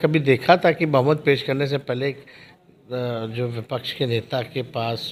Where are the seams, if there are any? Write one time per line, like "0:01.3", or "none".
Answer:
none